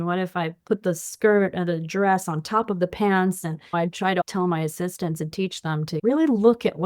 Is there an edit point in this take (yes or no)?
yes